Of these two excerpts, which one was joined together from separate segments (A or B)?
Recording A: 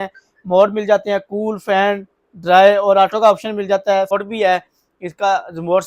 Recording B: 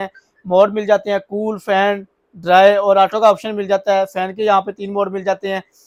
A